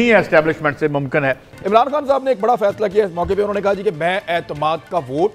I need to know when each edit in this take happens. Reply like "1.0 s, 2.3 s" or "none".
1.5 s